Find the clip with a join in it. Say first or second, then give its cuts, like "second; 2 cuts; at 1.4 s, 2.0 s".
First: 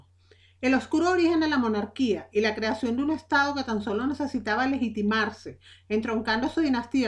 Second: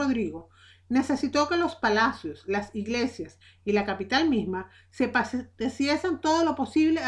first; 1 cut; at 1.1 s